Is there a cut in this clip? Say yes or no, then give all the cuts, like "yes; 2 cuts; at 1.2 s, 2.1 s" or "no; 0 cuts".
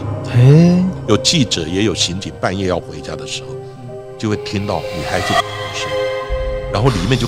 no; 0 cuts